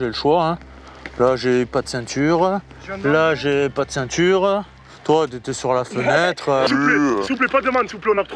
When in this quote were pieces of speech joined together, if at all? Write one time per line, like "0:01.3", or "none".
0:06.7